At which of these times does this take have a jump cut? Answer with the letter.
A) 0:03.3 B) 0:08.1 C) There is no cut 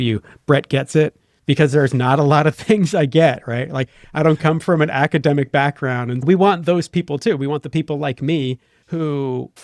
C